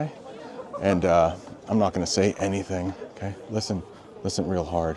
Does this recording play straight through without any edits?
yes; 0 cuts

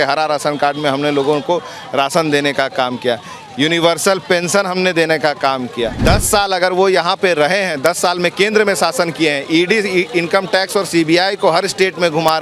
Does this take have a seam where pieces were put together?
yes; 1 cut; at 6.0 s

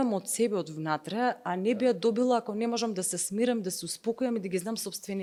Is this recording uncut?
yes; 0 cuts

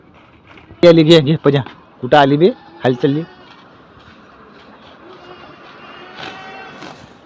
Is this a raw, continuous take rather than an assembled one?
yes; 0 cuts

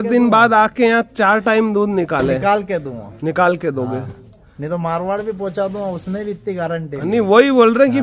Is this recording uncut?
yes; 0 cuts

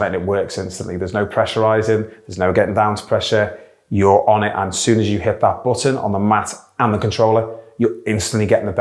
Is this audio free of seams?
yes; 0 cuts

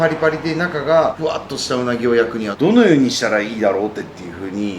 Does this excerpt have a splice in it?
no; 0 cuts

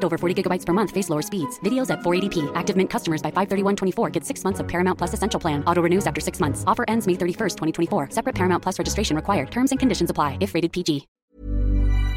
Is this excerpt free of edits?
no; 1 cut; at 11.1 s

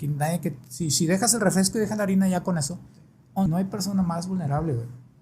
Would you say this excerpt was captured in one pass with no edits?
no; 1 cut; at 3.5 s

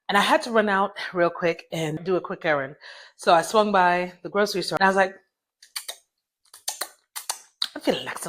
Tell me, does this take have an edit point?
yes; 2 cuts; at 2.0 s, 4.7 s

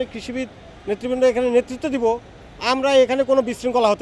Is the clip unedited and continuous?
yes; 0 cuts

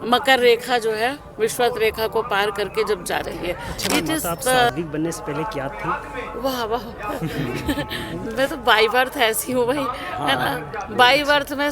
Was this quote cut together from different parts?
yes; 1 cut; at 4.7 s

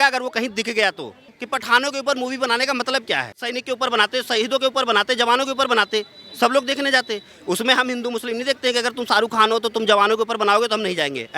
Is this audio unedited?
no; 2 cuts; at 1.4 s, 3.6 s

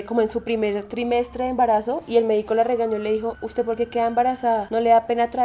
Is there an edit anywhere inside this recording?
no; 0 cuts

